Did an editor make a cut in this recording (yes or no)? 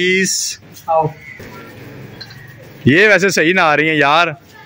yes